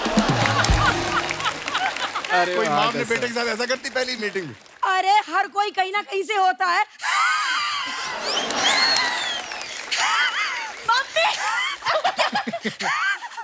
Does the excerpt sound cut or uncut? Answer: uncut